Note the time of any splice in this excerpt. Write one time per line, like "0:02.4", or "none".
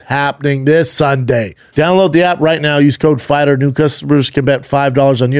0:01.6